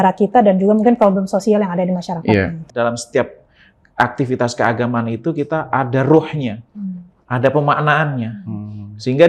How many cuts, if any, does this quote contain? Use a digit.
1